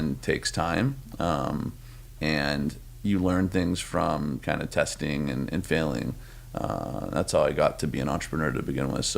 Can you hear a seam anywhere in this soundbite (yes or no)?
no